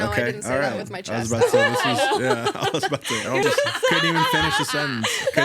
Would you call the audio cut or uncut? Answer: cut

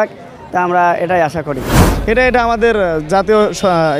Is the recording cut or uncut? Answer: cut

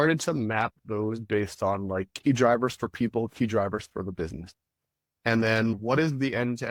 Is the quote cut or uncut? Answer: uncut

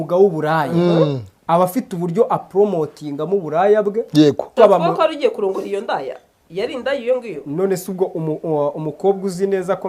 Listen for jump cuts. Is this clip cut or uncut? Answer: cut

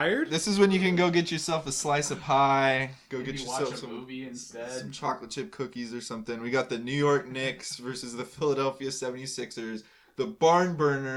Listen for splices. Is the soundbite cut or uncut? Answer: uncut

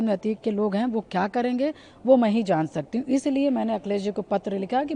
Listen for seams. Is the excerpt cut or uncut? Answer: uncut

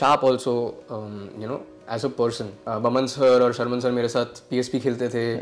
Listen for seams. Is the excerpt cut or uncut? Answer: cut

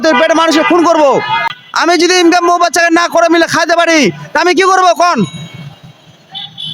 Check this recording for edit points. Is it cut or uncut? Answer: cut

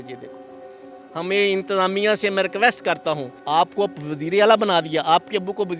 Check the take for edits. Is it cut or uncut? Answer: cut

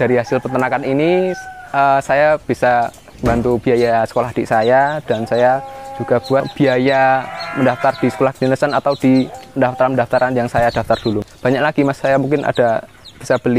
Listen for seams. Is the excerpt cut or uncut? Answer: cut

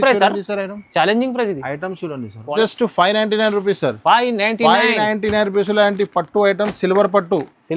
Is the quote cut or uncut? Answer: cut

